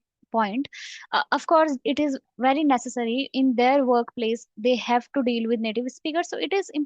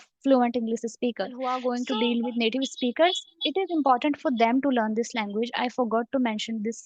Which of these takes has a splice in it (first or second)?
second